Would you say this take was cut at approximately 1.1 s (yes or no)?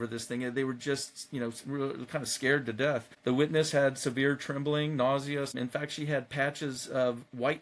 no